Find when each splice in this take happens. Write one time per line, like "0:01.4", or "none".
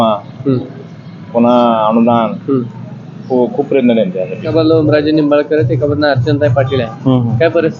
0:04.5